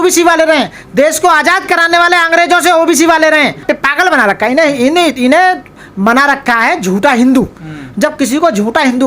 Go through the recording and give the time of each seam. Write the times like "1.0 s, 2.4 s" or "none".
3.6 s